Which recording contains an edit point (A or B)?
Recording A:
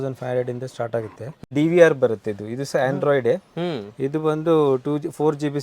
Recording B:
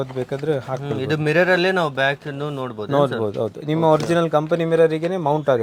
A